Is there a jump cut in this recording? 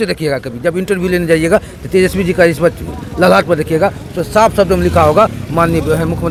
no; 0 cuts

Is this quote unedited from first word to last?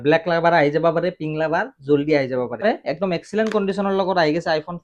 no; 1 cut; at 2.6 s

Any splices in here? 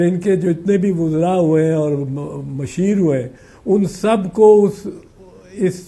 no; 0 cuts

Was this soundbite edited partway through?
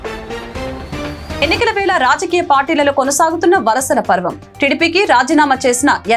yes; 1 cut; at 1.4 s

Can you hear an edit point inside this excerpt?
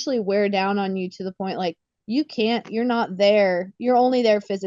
no; 0 cuts

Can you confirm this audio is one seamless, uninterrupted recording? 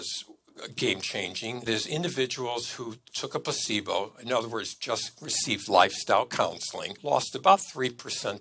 no; 3 cuts; at 1.7 s, 3.1 s, 7.0 s

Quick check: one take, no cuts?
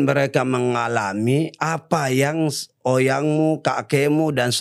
yes; 0 cuts

